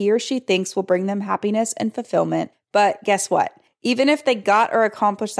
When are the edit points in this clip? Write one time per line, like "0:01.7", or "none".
0:02.6
0:03.7